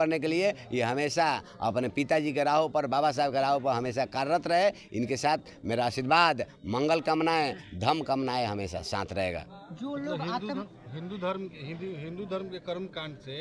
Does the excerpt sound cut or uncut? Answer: uncut